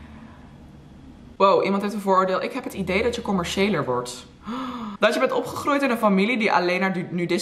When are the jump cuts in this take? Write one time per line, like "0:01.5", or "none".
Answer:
0:01.2
0:04.9

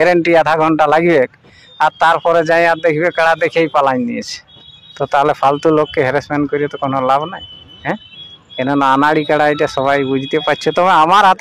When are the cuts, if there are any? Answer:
none

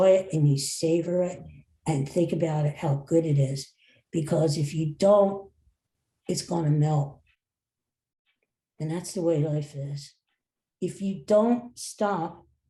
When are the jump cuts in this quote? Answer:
none

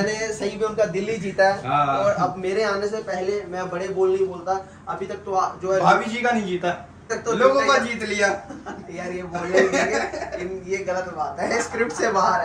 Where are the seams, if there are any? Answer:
0:07.1

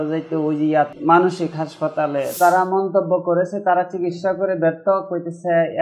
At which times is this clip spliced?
0:00.9
0:02.3

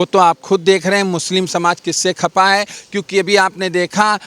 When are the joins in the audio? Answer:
none

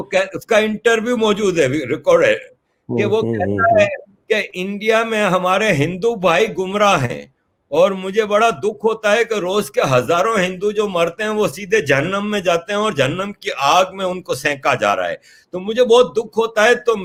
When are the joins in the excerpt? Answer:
none

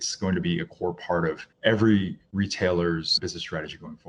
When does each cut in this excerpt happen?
0:01.5
0:03.2

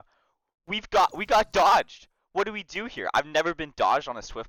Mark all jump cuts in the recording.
none

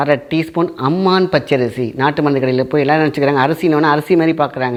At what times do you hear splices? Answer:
none

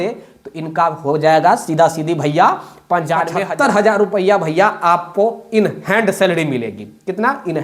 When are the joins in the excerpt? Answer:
0:03.4

